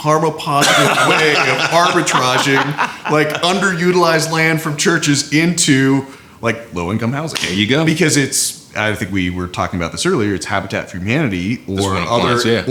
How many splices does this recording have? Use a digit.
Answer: 0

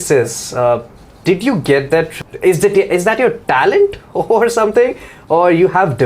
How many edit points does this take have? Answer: 1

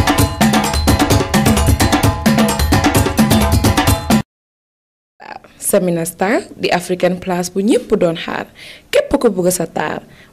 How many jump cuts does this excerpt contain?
0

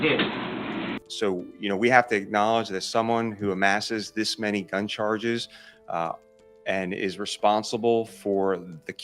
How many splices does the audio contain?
1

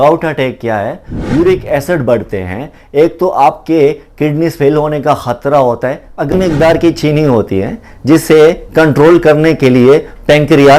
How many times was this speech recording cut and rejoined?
2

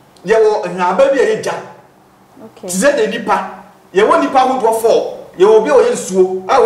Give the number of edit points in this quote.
0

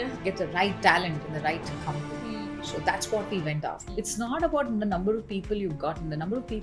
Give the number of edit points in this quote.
1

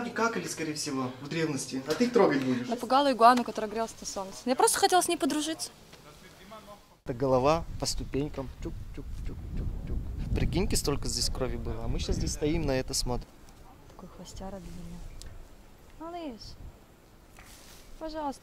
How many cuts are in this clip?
3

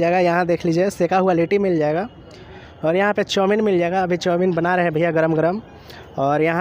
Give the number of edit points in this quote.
0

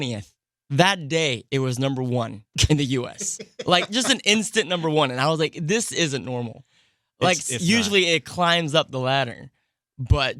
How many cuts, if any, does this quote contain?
1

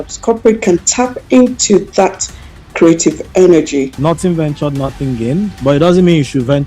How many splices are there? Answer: 1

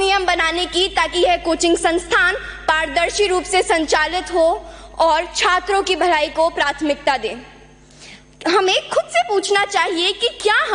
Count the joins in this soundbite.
0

